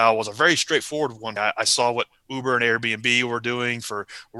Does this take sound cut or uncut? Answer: cut